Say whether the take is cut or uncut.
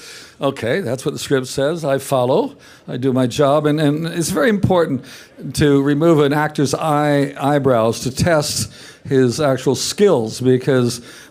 uncut